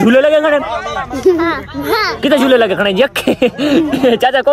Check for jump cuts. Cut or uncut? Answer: uncut